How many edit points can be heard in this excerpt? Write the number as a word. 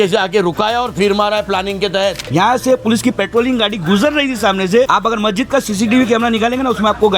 one